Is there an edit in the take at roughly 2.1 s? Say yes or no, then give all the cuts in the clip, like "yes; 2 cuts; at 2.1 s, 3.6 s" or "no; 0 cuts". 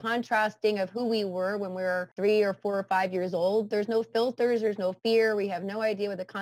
yes; 1 cut; at 2.1 s